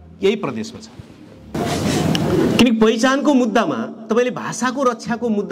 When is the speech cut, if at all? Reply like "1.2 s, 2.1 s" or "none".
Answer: 1.5 s